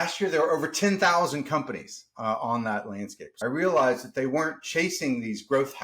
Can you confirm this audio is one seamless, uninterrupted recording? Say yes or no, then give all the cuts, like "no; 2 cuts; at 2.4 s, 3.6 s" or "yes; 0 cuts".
no; 1 cut; at 3.2 s